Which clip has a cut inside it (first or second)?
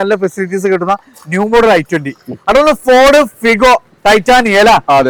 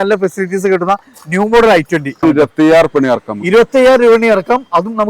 second